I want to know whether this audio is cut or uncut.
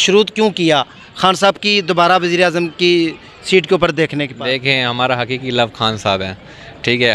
uncut